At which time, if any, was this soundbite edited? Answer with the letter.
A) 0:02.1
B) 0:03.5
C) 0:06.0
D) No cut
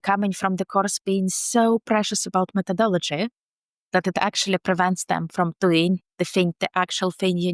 D